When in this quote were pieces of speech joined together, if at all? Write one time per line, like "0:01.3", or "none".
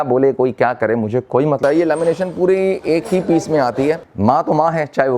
0:01.6
0:04.1